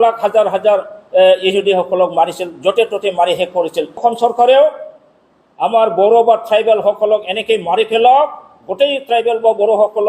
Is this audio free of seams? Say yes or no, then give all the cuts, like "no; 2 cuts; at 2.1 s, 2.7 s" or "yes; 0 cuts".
no; 1 cut; at 4.0 s